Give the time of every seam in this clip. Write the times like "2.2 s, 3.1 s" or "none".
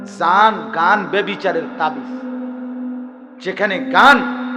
2.0 s, 3.3 s